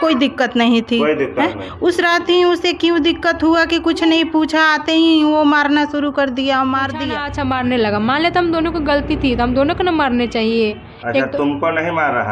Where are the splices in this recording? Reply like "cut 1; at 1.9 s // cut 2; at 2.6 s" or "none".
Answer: cut 1; at 7.2 s